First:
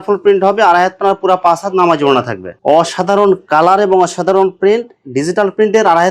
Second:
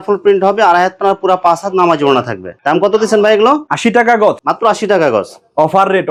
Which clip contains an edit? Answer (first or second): first